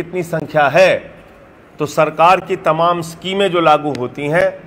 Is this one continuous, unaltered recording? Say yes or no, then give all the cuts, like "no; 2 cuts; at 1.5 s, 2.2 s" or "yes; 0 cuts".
yes; 0 cuts